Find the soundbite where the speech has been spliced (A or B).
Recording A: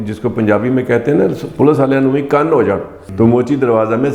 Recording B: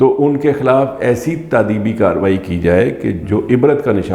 A